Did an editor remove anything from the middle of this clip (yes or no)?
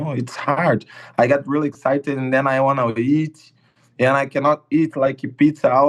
no